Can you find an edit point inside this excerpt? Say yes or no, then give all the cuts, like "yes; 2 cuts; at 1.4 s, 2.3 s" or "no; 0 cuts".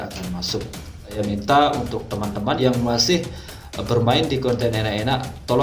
yes; 2 cuts; at 1.2 s, 2.6 s